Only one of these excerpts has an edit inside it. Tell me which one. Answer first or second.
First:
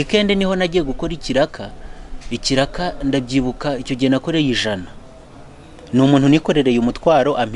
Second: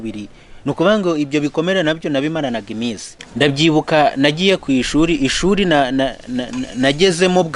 second